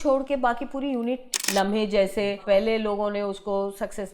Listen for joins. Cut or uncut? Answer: cut